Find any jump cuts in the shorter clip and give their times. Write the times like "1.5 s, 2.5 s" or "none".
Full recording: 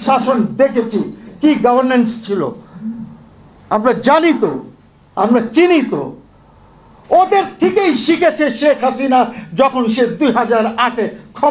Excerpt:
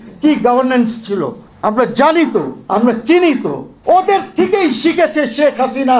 1.4 s, 2.6 s, 3.7 s

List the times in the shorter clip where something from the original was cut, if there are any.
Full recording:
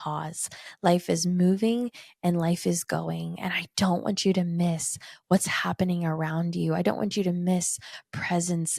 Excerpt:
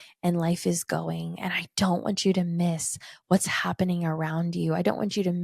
none

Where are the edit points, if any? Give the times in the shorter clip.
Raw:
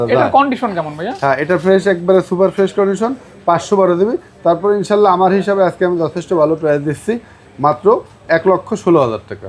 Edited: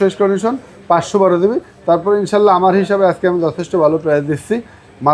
none

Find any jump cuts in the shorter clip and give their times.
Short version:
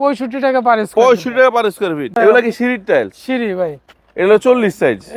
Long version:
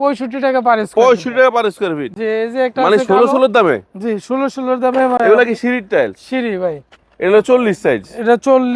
2.1 s

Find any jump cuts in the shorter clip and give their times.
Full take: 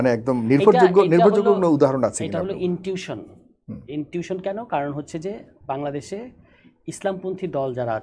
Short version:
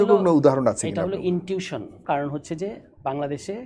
2.0 s

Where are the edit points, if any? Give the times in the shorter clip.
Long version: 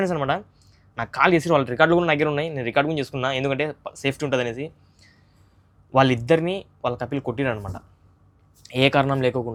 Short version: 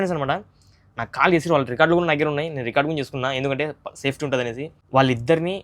4.7 s

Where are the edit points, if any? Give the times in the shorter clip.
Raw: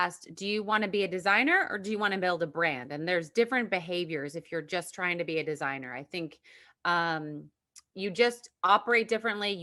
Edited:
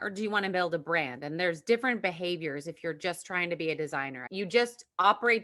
4.2 s

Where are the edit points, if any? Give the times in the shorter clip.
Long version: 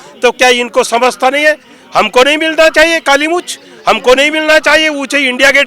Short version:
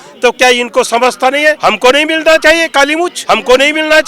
1.6 s, 3.2 s

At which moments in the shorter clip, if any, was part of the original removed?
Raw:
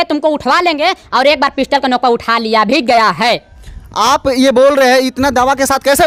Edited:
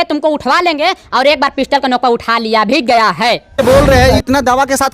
3.6 s

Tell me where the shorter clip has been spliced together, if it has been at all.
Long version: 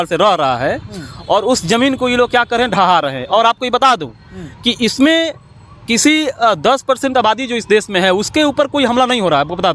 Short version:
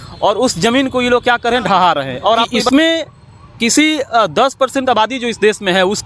2.6 s

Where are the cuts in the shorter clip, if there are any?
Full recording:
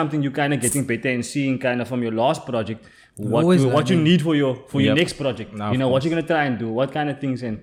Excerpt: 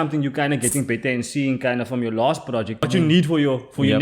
2.9 s

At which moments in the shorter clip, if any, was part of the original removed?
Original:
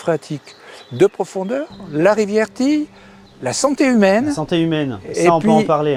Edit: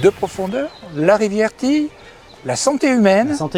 none

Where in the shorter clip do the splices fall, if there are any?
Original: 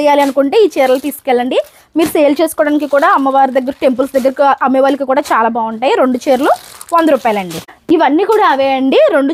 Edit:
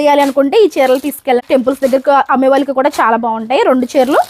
1.4 s

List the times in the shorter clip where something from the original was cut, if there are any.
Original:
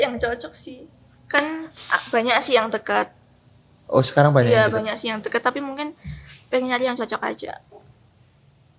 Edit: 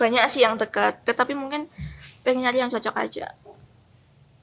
1.0 s

